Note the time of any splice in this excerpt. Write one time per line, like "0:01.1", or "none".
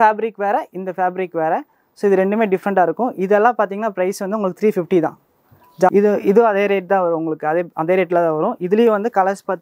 0:05.9